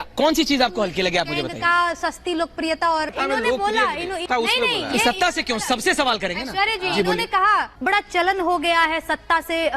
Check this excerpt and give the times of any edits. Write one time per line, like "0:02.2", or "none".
none